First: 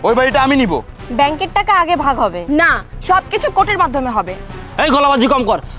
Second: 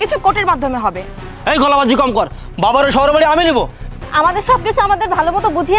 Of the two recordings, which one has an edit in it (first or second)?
second